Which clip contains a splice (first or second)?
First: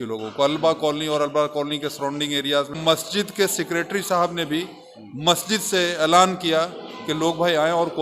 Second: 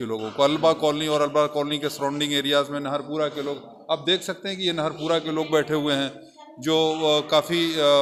first